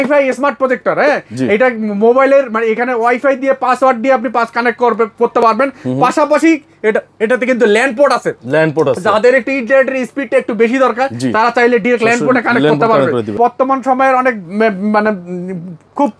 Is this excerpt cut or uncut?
cut